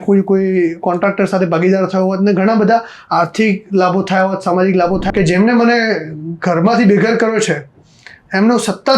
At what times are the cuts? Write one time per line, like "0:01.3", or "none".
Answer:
0:05.1